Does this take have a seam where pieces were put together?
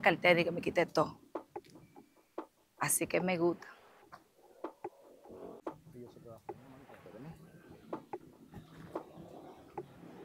no; 0 cuts

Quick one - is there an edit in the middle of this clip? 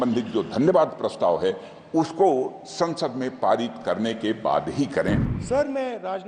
yes; 1 cut; at 5.3 s

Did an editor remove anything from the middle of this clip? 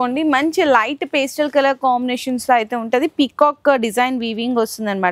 no; 0 cuts

